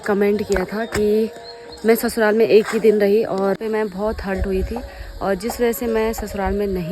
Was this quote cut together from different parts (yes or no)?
yes